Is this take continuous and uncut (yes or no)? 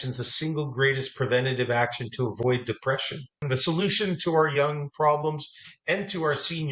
no